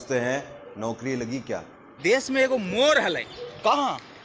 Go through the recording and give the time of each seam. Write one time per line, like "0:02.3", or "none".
0:02.0

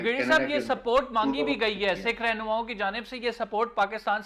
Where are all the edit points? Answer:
none

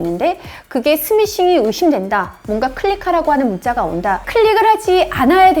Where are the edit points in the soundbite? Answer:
0:04.2

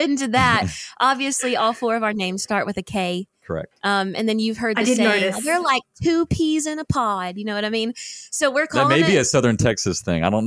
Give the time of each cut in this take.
none

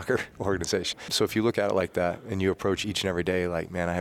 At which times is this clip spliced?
0:01.1
0:02.8

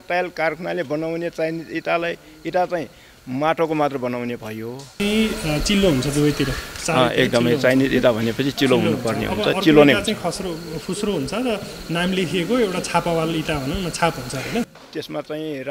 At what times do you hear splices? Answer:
0:05.0
0:14.7

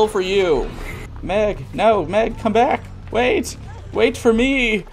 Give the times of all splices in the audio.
0:01.1

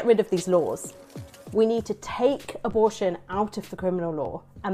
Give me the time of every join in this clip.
0:01.1

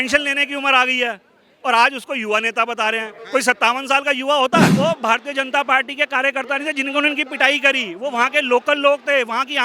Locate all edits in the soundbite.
0:04.7

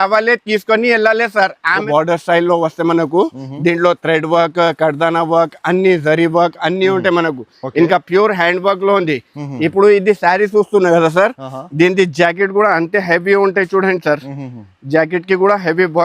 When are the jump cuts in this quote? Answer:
0:01.9

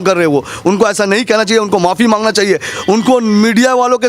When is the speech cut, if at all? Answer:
none

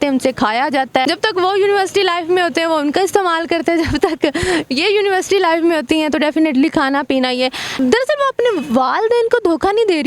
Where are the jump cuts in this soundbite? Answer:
0:01.0
0:07.7

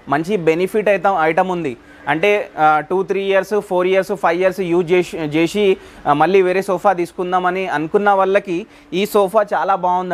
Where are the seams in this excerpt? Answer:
none

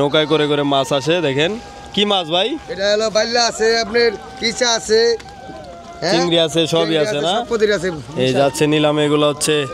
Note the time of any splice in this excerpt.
none

